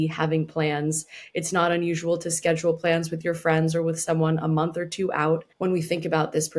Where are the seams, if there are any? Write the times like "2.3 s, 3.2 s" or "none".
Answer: 5.5 s